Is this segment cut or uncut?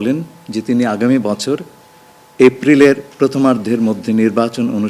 uncut